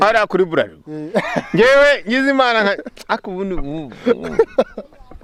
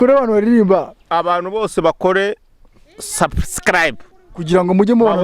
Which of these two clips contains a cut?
second; 1 cut; at 1.0 s

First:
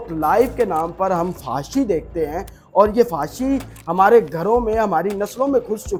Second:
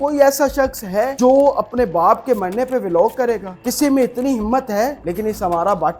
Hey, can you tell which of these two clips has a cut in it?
second; 3 cuts; at 1.1 s, 3.5 s, 5.0 s

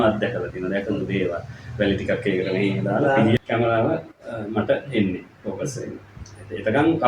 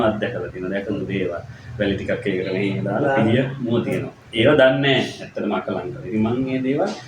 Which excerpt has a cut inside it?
first; 1 cut; at 3.4 s

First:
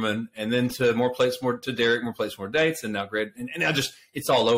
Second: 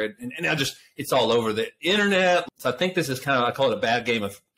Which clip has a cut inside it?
second; 1 cut; at 2.4 s

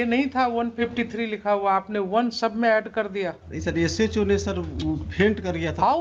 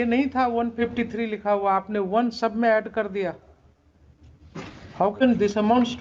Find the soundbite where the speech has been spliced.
first; 1 cut; at 3.5 s

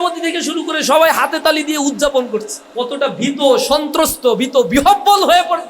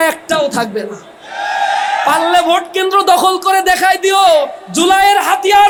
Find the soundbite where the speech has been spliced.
first; 1 cut; at 2.6 s

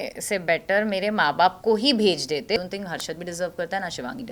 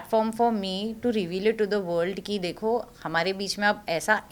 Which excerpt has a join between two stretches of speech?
first; 1 cut; at 2.6 s

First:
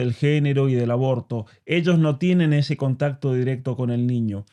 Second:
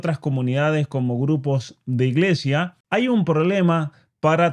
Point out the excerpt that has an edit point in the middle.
second; 1 cut; at 2.8 s

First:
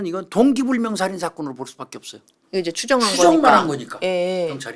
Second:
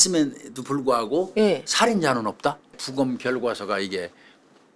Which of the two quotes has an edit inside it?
second; 1 cut; at 2.8 s

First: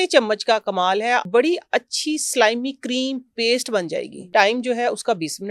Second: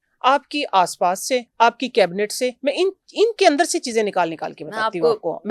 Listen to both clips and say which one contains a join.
first; 2 cuts; at 1.2 s, 4.2 s

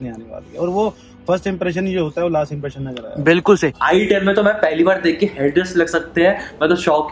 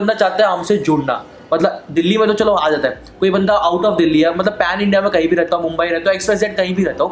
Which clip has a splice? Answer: first; 1 cut; at 3.8 s

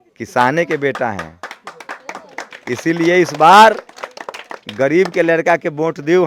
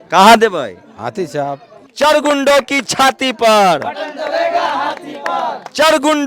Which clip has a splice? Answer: second; 1 cut; at 1.8 s

